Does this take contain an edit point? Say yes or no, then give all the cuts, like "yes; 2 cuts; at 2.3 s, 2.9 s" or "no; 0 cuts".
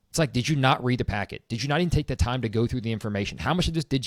no; 0 cuts